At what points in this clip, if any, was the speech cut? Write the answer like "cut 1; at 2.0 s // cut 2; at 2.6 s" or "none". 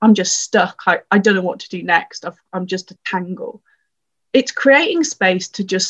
cut 1; at 4.1 s